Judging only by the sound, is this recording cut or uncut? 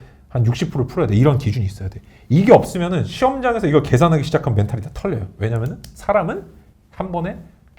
uncut